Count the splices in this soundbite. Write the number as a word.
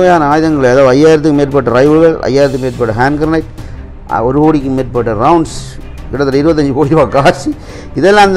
zero